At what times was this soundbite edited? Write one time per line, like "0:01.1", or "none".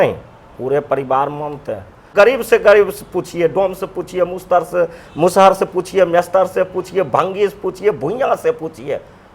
0:02.1